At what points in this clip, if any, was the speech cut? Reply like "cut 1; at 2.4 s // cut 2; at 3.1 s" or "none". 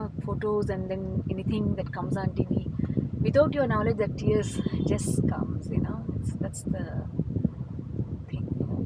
none